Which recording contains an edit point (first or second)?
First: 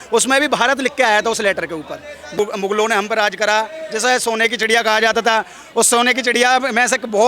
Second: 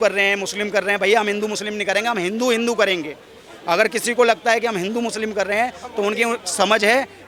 first